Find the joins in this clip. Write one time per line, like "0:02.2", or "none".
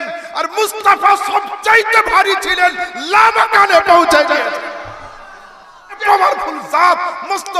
0:06.0

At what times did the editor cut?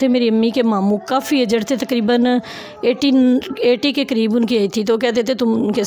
none

